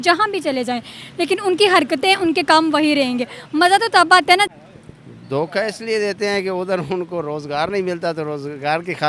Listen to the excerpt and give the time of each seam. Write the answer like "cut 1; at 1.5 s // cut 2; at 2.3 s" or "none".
cut 1; at 4.5 s